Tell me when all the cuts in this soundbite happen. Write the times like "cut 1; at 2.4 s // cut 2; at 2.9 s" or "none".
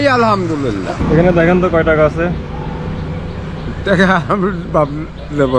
cut 1; at 0.9 s